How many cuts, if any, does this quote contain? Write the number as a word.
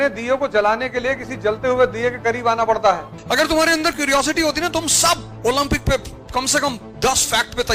one